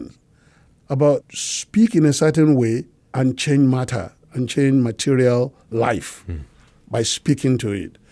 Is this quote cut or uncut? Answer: cut